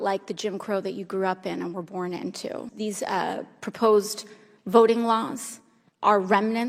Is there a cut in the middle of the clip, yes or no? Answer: yes